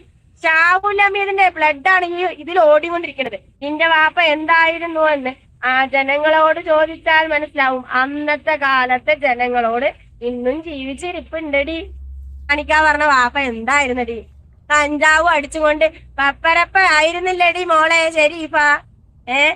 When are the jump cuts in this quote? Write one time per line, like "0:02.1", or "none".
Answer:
0:03.5
0:12.5